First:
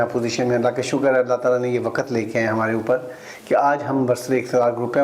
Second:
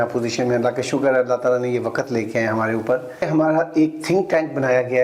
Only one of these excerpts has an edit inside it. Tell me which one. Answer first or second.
second